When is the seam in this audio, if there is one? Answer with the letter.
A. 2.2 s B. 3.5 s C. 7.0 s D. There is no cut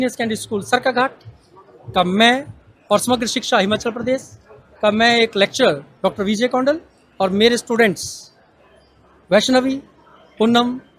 D